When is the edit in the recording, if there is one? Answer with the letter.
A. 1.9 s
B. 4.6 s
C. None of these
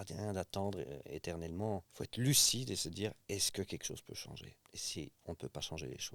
C